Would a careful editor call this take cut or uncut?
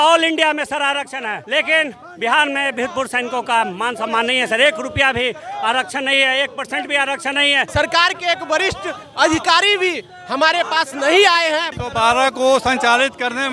cut